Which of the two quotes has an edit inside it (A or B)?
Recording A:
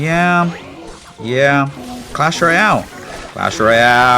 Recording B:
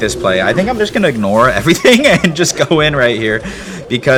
A